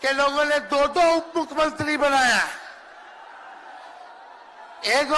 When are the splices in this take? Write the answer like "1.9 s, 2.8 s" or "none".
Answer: none